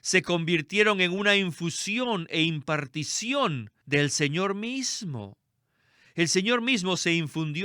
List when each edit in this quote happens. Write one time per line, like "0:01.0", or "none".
0:03.7